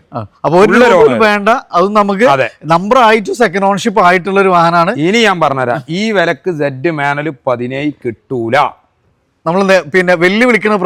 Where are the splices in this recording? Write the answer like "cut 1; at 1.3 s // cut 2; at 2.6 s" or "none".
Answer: none